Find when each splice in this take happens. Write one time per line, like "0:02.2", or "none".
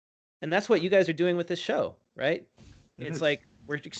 none